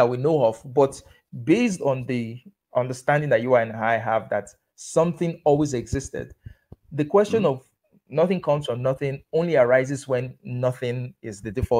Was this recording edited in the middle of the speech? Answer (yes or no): no